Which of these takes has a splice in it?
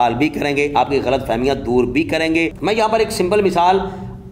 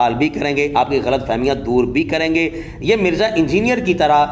first; 1 cut; at 2.5 s

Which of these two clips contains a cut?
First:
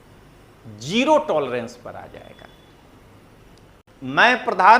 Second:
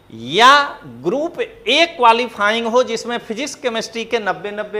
first; 1 cut; at 3.8 s

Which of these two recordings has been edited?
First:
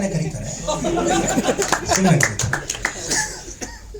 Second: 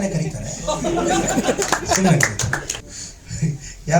second; 1 cut; at 2.9 s

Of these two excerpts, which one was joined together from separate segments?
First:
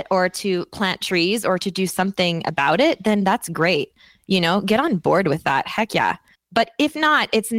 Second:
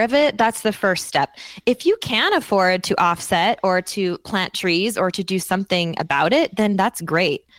first; 1 cut; at 6.3 s

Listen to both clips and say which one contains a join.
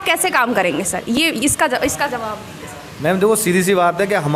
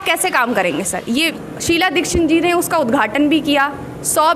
second; 1 cut; at 1.2 s

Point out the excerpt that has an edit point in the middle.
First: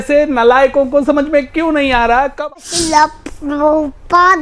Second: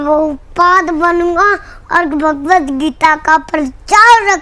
first; 1 cut; at 2.3 s

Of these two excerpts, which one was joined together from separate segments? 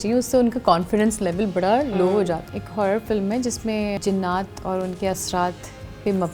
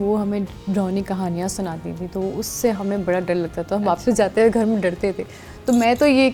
first; 2 cuts; at 2.6 s, 4.0 s

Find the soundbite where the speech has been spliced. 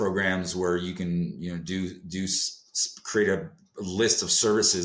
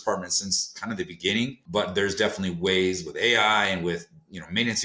second; 1 cut; at 1.7 s

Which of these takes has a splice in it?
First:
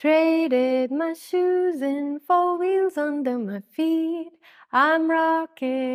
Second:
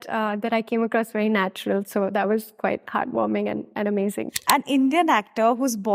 second; 1 cut; at 4.4 s

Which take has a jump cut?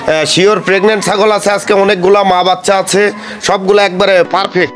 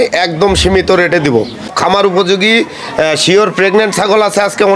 second; 1 cut; at 1.7 s

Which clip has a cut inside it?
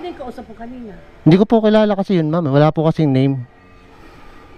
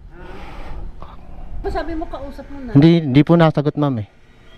second; 1 cut; at 1.6 s

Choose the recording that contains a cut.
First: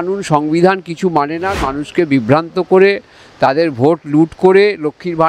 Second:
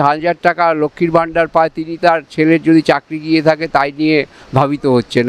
first; 1 cut; at 1.6 s

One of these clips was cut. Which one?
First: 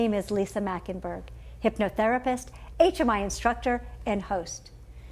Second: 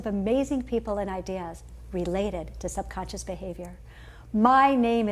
first; 1 cut; at 3.1 s

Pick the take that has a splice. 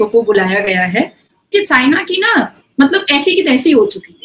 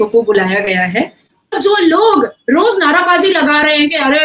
second; 1 cut; at 1.5 s

